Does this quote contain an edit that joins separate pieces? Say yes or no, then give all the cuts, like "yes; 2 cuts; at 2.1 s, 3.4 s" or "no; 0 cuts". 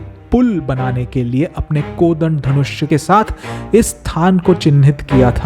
yes; 1 cut; at 2.9 s